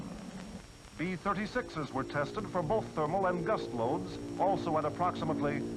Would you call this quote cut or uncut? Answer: uncut